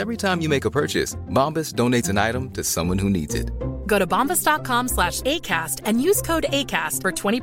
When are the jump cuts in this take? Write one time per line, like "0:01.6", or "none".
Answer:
none